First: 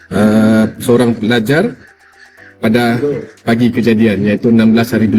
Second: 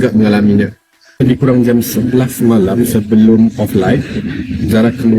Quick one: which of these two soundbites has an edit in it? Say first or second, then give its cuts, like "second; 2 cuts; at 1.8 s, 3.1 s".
second; 1 cut; at 1.2 s